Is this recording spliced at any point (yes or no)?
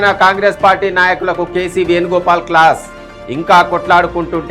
no